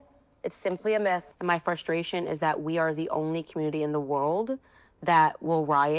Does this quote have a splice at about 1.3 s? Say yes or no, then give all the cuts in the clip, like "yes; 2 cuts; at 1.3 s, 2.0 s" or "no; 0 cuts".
yes; 1 cut; at 1.3 s